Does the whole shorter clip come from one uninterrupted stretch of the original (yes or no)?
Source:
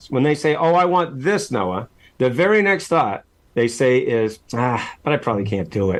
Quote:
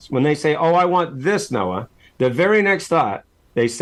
yes